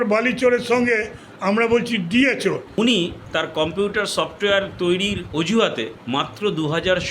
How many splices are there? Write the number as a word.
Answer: three